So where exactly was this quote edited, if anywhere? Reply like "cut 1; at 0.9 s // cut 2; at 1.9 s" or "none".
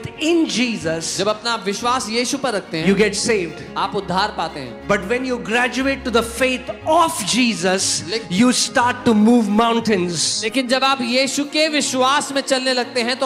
none